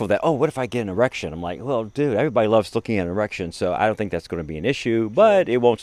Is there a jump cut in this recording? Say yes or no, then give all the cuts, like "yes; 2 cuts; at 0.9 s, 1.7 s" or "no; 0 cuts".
no; 0 cuts